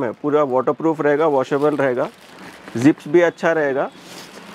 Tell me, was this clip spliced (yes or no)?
no